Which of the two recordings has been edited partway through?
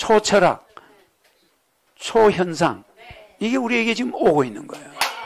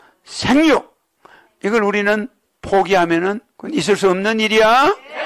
second; 1 cut; at 3.5 s

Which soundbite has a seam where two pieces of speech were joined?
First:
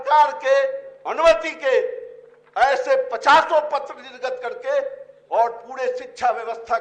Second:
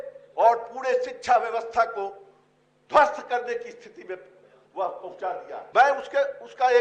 second; 1 cut; at 5.6 s

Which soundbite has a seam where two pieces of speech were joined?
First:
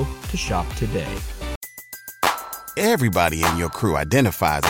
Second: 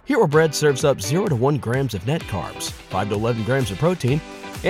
first; 1 cut; at 1.6 s

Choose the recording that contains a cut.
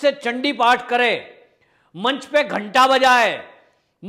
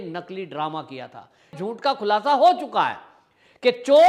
second; 1 cut; at 1.5 s

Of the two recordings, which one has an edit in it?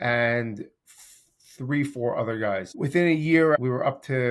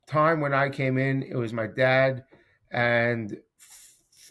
first; 2 cuts; at 2.7 s, 3.6 s

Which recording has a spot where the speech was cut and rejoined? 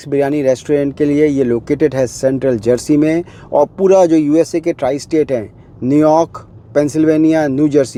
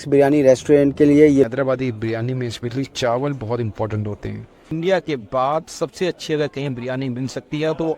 second; 2 cuts; at 1.5 s, 4.7 s

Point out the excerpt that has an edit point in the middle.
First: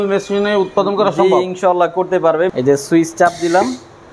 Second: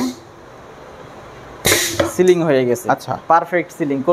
first; 1 cut; at 2.5 s

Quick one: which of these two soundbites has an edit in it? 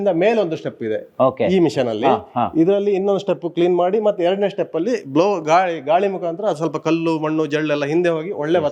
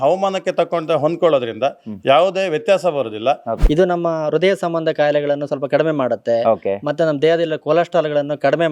second; 1 cut; at 3.5 s

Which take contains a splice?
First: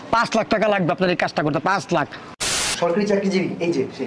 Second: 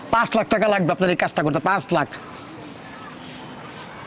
first; 1 cut; at 2.7 s

